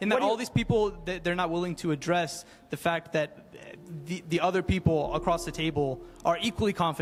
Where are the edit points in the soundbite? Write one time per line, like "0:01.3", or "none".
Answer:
none